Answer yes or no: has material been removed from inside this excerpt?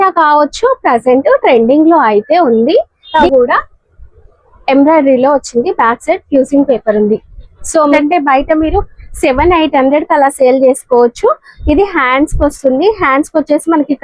yes